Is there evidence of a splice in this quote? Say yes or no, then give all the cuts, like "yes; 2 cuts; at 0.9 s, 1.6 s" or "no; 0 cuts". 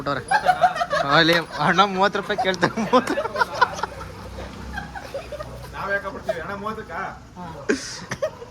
no; 0 cuts